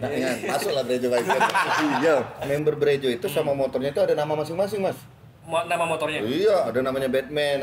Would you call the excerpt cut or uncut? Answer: cut